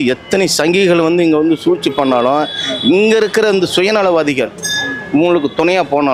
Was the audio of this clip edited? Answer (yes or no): no